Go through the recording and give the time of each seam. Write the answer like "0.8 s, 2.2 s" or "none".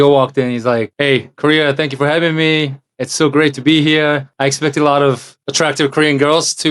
0.9 s, 4.3 s, 5.3 s